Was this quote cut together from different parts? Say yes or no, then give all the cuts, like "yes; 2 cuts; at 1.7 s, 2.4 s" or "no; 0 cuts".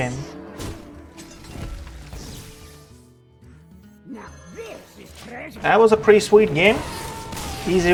no; 0 cuts